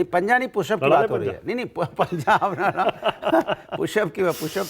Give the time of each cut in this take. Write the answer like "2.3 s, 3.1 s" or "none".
none